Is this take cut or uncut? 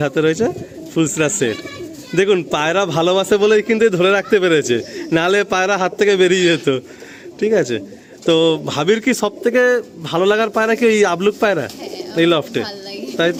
uncut